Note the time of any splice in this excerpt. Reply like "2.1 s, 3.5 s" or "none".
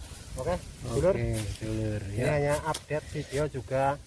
none